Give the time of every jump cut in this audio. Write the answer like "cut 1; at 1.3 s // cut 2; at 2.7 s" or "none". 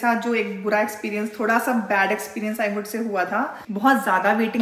cut 1; at 3.6 s